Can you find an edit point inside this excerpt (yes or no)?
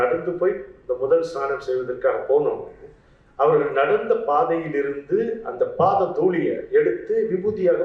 no